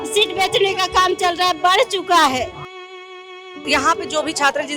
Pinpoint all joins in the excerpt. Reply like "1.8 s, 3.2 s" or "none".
3.0 s